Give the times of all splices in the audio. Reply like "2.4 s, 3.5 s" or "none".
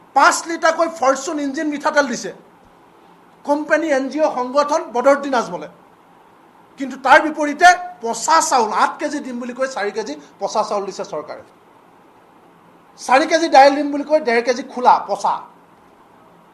none